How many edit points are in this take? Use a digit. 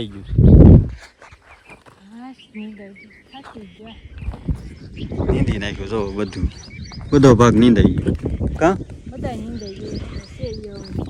0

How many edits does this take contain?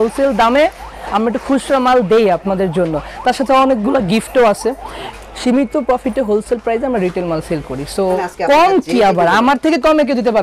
2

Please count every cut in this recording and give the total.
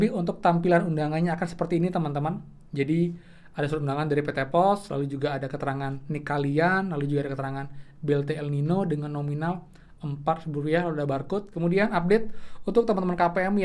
1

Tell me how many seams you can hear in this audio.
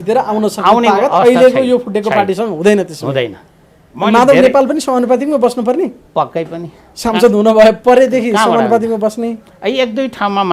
0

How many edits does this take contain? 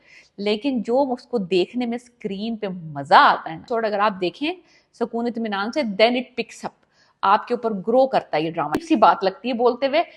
2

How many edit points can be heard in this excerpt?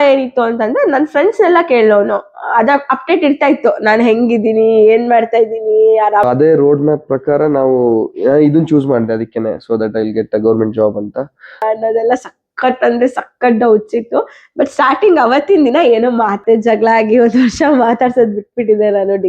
3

